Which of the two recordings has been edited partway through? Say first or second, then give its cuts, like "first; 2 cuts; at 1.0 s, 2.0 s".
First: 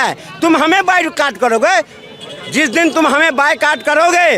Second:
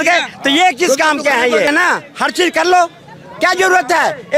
second; 1 cut; at 1.7 s